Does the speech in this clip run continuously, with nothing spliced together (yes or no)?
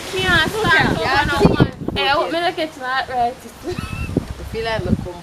no